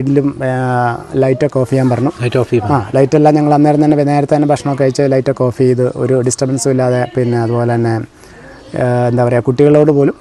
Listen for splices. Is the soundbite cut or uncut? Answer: uncut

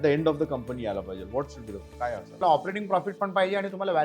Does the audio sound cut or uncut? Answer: cut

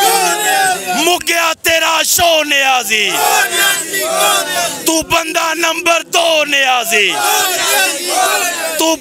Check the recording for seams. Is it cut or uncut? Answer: uncut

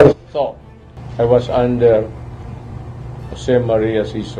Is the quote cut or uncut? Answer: uncut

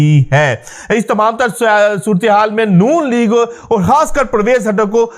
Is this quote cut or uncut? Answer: uncut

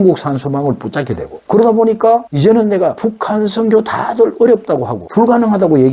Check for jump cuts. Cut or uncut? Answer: cut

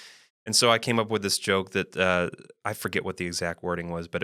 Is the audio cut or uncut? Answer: uncut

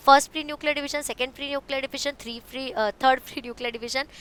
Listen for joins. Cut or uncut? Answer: uncut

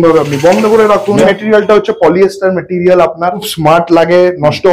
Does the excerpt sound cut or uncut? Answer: cut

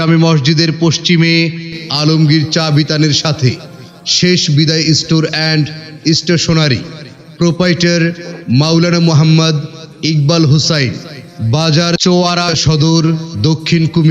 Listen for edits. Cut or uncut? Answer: uncut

